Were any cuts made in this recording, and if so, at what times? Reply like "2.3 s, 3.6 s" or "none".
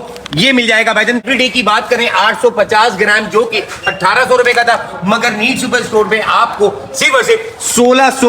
1.3 s